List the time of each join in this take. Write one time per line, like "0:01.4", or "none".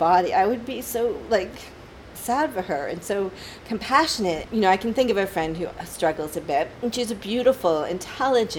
0:04.4